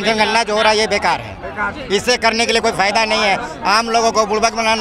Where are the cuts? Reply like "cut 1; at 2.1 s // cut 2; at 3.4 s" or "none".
none